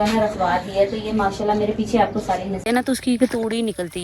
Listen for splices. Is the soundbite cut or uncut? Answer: cut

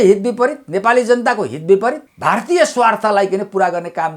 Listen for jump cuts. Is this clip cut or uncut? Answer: cut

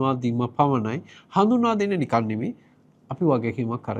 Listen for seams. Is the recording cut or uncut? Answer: uncut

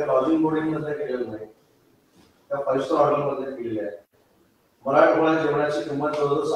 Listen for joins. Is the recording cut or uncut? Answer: uncut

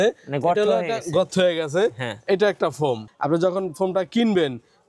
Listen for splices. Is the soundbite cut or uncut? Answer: cut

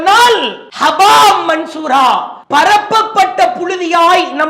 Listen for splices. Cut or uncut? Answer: cut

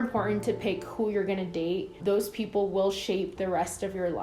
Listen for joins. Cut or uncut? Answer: cut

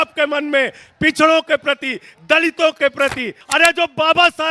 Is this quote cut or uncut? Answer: cut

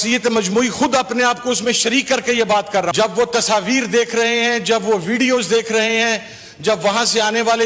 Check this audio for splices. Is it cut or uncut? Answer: cut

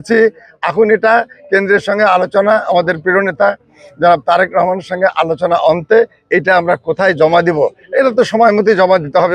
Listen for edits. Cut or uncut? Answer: uncut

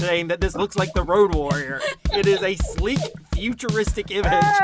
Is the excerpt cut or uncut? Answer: cut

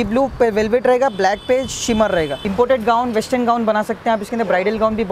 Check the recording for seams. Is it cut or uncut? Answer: cut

